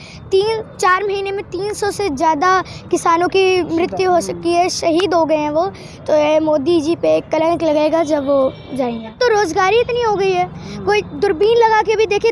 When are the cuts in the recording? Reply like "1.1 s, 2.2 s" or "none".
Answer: 9.1 s